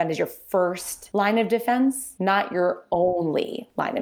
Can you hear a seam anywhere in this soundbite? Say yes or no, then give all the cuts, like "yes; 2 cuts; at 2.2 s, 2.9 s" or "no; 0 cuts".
yes; 2 cuts; at 0.9 s, 2.1 s